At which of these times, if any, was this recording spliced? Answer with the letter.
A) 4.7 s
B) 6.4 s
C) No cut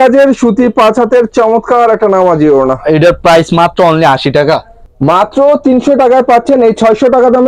A